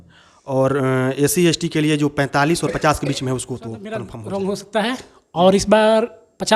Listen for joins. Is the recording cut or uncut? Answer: cut